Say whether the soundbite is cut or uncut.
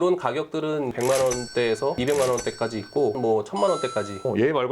cut